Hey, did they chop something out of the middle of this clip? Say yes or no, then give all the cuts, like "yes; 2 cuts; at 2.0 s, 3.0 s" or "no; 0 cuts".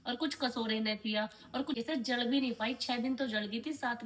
yes; 1 cut; at 1.8 s